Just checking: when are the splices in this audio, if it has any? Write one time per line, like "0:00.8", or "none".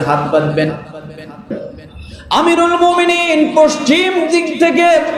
0:01.5